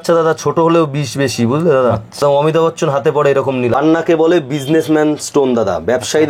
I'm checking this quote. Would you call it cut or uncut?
cut